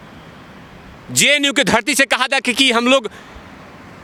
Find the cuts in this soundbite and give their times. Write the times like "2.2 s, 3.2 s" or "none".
none